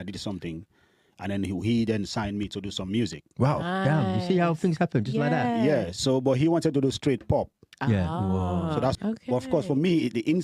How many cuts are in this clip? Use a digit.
1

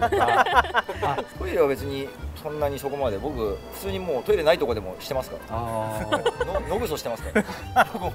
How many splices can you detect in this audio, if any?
1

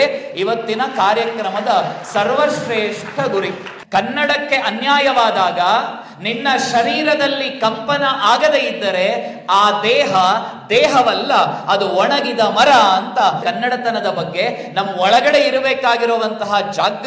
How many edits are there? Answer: 2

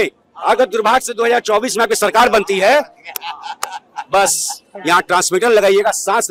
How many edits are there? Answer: 0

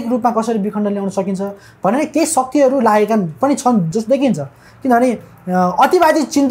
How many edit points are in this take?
0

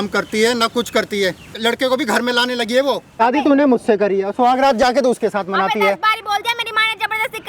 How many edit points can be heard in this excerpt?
2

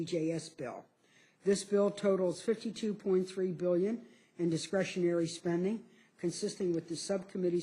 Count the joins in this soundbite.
1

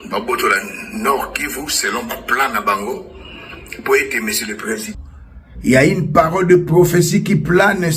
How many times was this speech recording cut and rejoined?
1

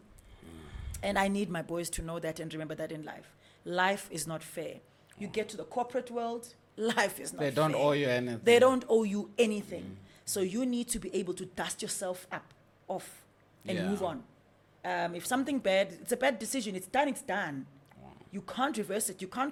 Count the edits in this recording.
0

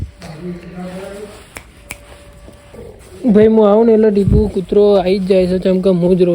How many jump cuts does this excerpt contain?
1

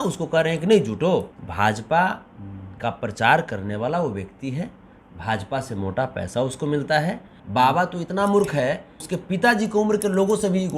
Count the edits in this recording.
3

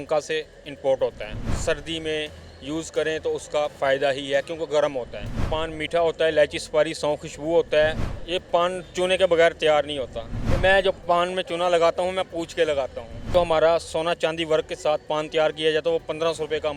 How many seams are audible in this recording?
5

